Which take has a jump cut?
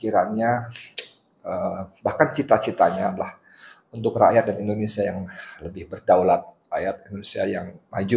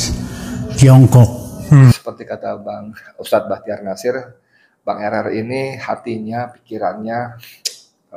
second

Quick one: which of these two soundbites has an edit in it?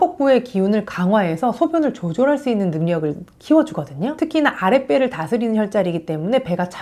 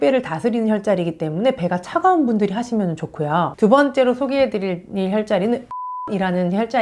second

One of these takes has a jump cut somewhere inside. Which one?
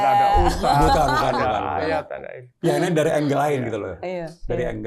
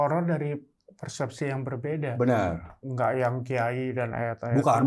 second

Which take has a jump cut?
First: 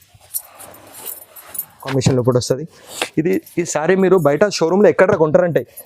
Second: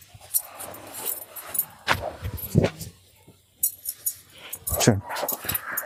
first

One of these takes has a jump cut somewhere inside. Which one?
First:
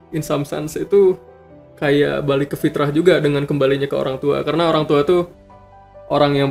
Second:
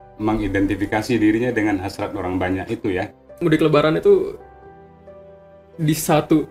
second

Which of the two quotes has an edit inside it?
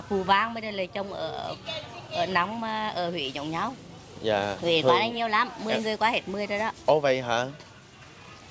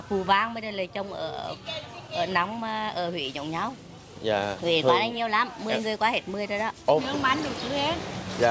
second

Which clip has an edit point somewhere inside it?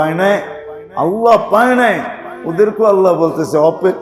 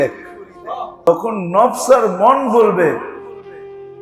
second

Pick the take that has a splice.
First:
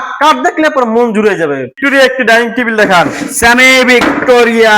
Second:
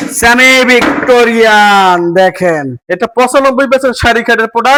first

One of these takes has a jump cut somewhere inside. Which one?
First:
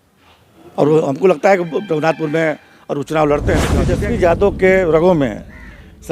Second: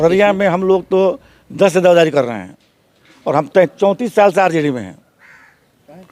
first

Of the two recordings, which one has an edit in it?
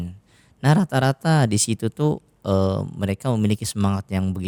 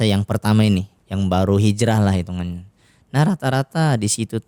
second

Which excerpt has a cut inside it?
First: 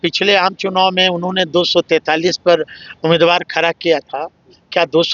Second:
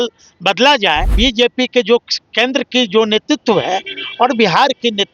second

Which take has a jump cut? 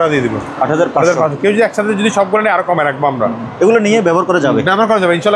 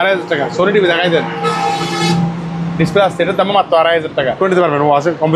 second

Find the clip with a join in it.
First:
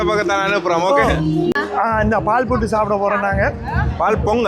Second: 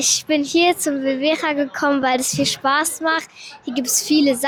first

